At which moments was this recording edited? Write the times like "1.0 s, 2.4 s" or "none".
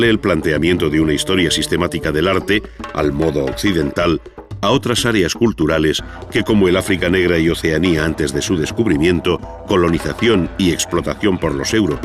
none